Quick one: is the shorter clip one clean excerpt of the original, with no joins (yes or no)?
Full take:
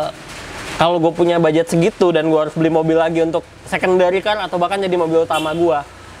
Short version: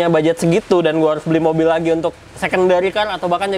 yes